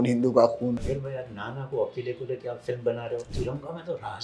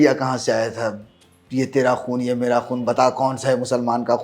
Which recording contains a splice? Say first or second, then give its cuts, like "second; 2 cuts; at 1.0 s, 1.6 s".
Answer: first; 2 cuts; at 0.9 s, 3.3 s